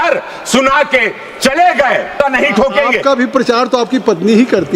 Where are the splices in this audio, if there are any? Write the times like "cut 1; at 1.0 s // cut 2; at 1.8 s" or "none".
cut 1; at 2.2 s